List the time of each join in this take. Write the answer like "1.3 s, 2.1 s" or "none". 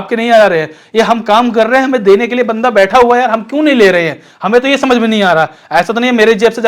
none